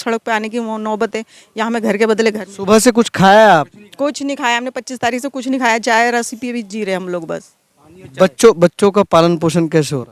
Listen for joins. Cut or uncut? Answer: uncut